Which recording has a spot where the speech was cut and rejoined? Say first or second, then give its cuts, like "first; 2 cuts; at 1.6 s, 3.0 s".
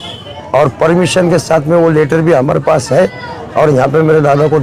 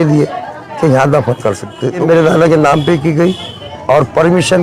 second; 1 cut; at 2.0 s